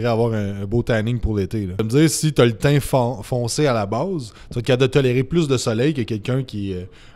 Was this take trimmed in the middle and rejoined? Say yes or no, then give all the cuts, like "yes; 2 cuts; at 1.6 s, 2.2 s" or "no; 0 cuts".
yes; 1 cut; at 1.8 s